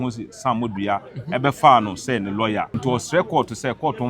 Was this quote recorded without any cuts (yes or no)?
no